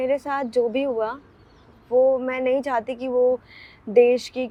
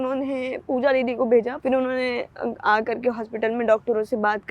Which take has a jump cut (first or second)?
second